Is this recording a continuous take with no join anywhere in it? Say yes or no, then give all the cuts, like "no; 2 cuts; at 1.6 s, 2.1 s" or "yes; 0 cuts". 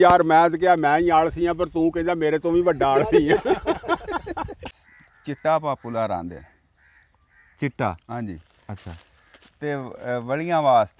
no; 1 cut; at 4.8 s